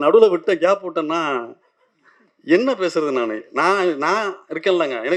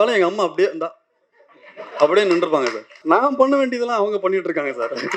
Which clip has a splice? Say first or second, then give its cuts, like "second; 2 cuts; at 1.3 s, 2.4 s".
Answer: second; 1 cut; at 2.9 s